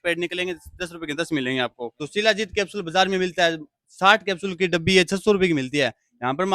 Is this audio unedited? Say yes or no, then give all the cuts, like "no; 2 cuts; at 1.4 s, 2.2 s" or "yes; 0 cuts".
no; 1 cut; at 1.9 s